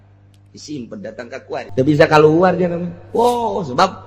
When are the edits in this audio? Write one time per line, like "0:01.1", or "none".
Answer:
0:01.7